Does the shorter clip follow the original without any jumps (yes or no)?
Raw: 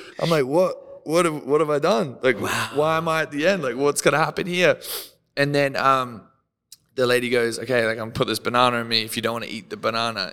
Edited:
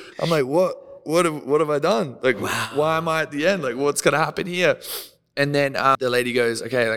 no